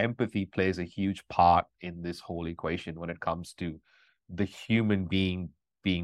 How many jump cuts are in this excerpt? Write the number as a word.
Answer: zero